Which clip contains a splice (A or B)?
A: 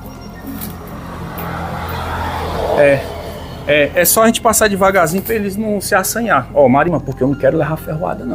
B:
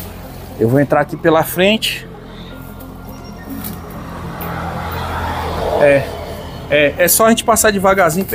A